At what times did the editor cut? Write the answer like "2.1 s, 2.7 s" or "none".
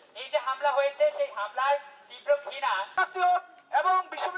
2.9 s